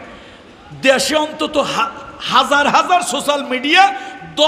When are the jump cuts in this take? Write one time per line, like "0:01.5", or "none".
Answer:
none